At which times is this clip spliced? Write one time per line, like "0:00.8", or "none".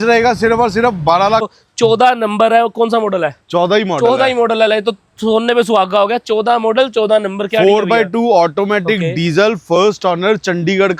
0:01.6